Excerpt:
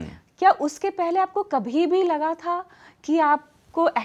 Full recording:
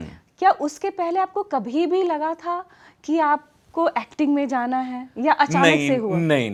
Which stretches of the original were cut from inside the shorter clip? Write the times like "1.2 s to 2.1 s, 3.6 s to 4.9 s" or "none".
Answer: none